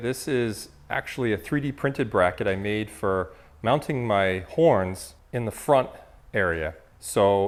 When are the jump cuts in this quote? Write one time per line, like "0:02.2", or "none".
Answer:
none